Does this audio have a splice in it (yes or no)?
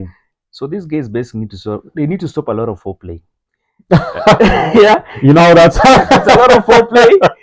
no